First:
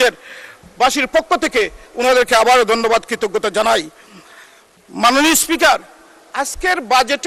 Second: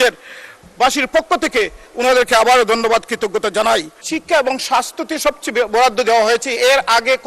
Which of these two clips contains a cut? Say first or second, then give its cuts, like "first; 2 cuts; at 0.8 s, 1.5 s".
second; 1 cut; at 4.0 s